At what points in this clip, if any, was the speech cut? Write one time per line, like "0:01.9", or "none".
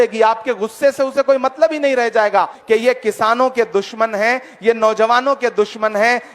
0:02.6